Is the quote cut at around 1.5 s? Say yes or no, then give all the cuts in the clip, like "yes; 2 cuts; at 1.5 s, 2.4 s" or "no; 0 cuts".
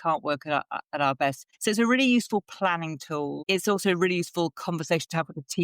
yes; 2 cuts; at 1.5 s, 3.4 s